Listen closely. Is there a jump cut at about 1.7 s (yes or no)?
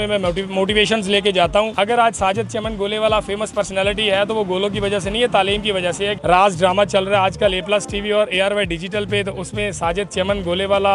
yes